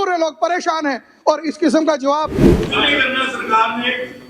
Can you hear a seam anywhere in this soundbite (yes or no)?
yes